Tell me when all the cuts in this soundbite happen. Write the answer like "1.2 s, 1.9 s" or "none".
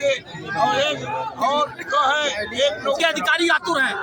3.0 s

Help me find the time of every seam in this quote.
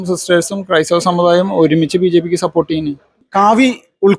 3.1 s

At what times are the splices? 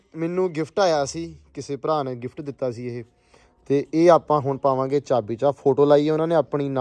none

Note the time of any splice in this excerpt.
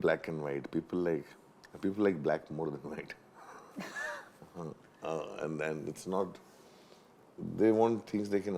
none

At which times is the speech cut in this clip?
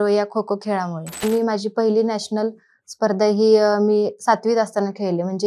1.2 s

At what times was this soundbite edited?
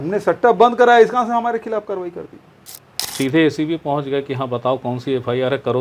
3.1 s

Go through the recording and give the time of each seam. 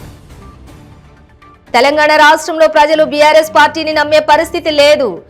1.1 s

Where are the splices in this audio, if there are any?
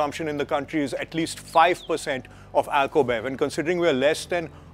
none

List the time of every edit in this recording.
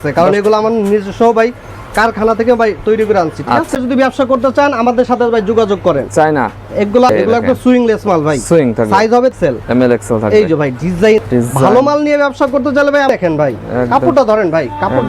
3.8 s, 7.1 s, 9.4 s, 11.2 s, 13.1 s

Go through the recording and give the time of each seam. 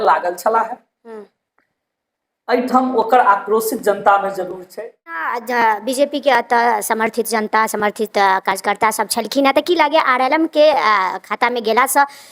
5.3 s

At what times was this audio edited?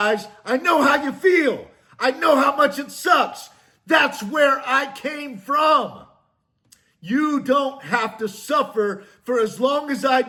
none

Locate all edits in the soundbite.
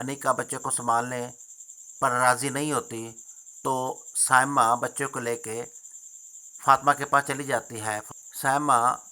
8.0 s

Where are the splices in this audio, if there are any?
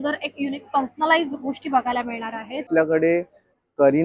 2.7 s

